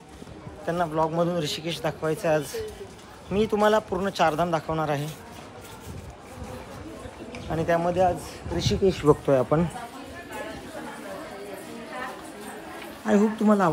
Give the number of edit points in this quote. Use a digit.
0